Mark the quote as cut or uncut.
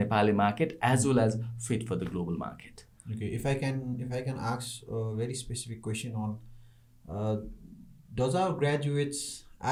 uncut